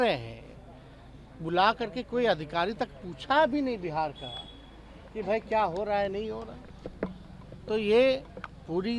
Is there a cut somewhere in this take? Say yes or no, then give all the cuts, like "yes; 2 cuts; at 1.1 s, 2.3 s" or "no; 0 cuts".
no; 0 cuts